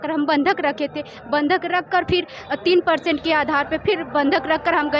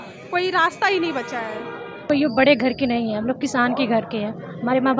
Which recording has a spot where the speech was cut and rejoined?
second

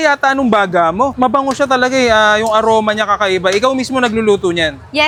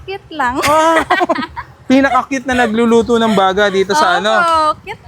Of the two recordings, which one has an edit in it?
second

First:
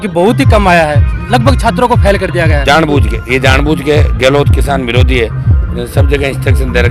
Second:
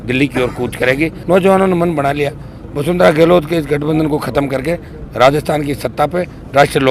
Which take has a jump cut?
second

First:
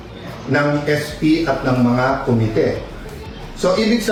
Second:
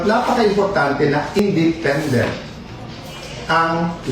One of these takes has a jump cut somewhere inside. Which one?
second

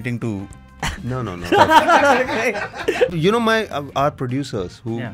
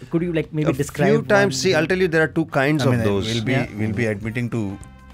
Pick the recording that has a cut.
first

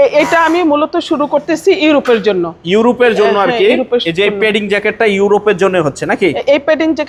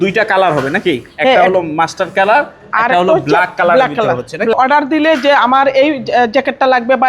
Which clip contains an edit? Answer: second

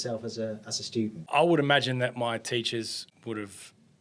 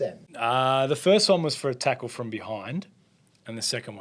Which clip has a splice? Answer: first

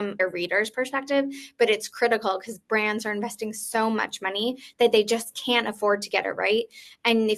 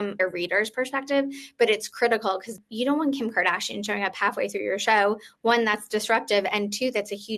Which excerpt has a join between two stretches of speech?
second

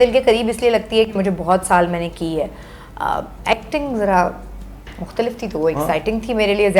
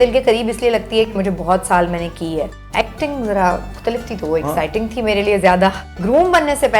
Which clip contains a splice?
second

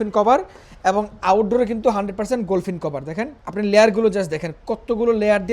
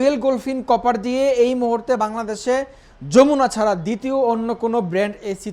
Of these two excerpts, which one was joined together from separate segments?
first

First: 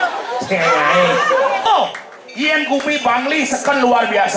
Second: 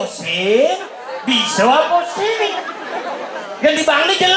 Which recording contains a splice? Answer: first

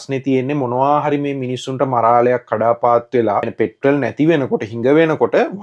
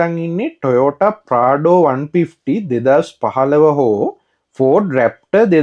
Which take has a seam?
first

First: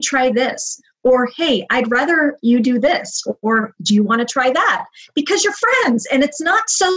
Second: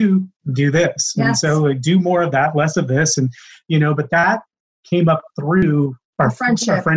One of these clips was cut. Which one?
second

